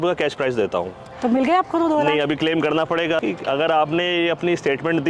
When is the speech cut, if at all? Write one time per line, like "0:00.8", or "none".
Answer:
0:03.2

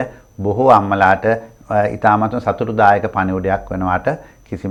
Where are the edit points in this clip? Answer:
none

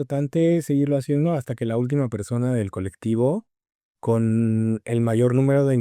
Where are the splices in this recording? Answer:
none

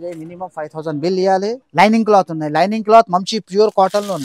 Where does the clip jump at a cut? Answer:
0:01.6

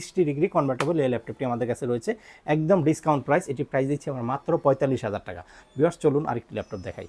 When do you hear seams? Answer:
none

